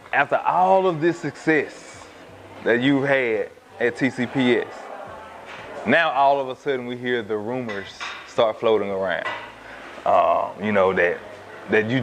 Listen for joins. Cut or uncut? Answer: uncut